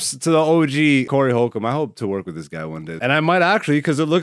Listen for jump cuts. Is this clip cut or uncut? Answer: cut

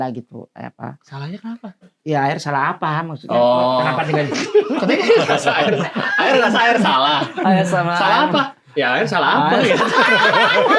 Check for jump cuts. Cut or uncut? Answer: uncut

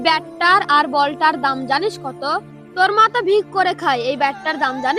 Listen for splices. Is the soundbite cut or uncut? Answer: uncut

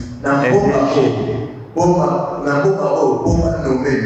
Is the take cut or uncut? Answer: uncut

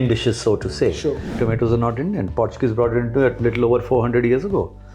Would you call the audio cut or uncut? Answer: cut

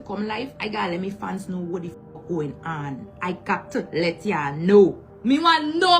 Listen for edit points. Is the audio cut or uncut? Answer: cut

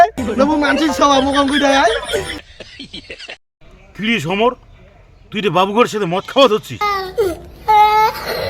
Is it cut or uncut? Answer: cut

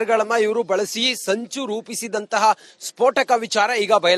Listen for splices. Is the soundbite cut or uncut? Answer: uncut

